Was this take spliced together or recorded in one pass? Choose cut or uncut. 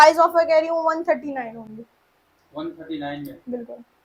uncut